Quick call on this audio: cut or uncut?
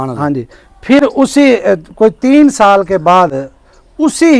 uncut